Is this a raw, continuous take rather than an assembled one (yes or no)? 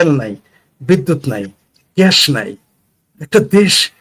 yes